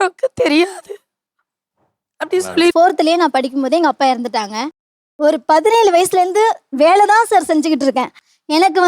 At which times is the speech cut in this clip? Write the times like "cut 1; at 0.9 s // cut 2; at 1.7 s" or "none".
cut 1; at 2.7 s